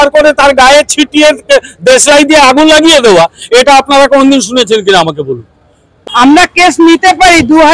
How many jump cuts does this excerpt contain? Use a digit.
1